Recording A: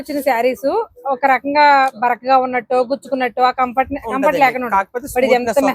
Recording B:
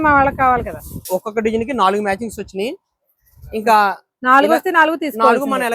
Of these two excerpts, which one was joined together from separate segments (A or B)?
B